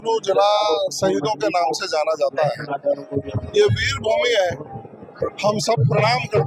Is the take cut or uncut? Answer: uncut